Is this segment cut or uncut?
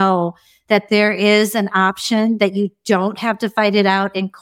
uncut